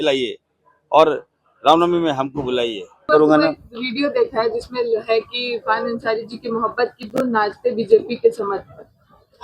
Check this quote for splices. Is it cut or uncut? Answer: cut